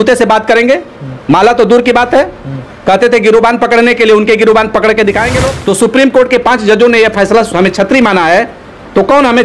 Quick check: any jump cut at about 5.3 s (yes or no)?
yes